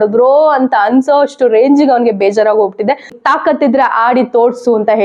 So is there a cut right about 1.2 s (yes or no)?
no